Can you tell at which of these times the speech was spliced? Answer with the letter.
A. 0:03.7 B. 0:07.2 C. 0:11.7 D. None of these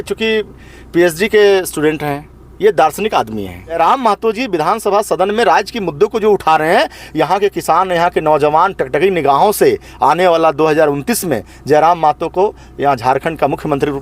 A